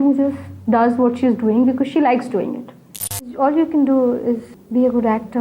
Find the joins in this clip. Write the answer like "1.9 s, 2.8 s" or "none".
3.2 s, 4.5 s